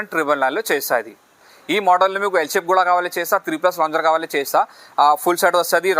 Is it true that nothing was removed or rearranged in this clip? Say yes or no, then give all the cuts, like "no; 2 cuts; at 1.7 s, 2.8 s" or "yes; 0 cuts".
no; 1 cut; at 1.3 s